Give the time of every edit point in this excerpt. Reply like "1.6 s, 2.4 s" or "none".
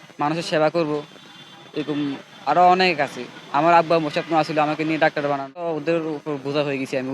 5.7 s